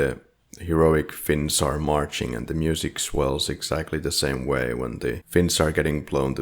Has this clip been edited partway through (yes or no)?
yes